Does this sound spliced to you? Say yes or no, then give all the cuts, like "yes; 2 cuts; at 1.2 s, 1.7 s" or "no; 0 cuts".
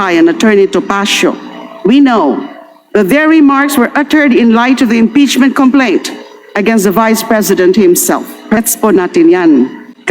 yes; 1 cut; at 8.6 s